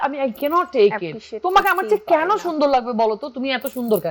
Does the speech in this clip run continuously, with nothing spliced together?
yes; 0 cuts

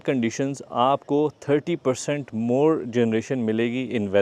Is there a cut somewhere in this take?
no; 0 cuts

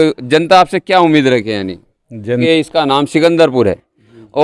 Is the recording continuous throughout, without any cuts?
no; 1 cut; at 2.4 s

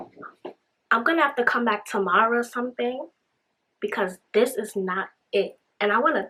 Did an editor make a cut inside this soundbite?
no; 0 cuts

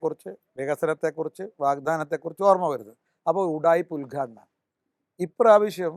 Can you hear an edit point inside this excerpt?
no; 0 cuts

